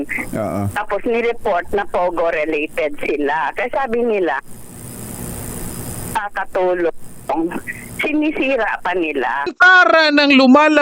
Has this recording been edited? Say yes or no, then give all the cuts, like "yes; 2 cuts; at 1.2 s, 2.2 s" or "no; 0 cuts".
yes; 1 cut; at 9.5 s